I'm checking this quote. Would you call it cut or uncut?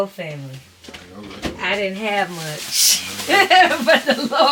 uncut